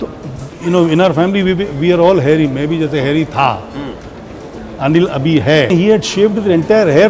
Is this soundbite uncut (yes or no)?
no